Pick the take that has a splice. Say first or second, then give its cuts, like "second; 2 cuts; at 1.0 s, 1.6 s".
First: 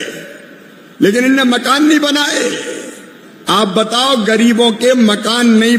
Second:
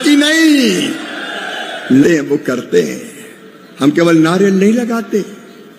second; 1 cut; at 2.0 s